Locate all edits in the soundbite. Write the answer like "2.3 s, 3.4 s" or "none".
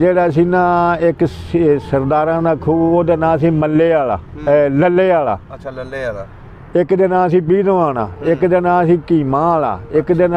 none